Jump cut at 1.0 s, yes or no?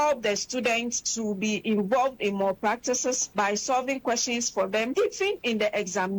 yes